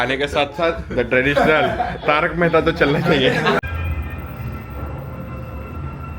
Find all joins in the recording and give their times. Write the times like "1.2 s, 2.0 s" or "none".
3.6 s